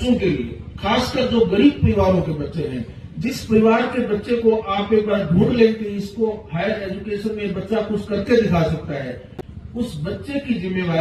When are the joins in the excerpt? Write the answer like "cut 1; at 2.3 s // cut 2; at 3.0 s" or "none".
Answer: none